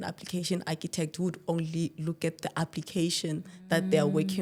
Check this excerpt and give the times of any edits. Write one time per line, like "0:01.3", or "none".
none